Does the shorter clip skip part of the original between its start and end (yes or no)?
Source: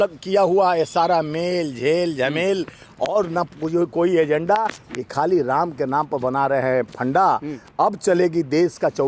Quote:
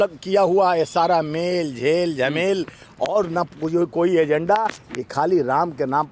no